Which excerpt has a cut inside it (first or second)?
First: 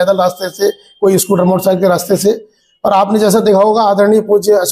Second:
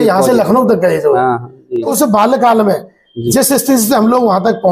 second